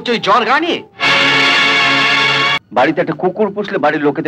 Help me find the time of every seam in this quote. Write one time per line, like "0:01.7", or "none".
0:02.6

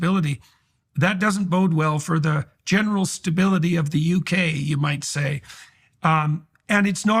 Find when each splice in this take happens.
none

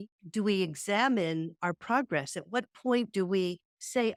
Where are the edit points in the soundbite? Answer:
none

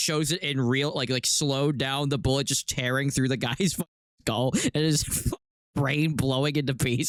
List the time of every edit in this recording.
none

